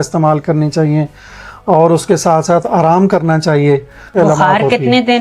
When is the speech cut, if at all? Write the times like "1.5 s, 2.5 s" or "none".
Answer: 4.1 s